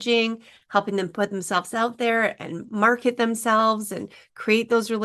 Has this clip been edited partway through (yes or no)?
no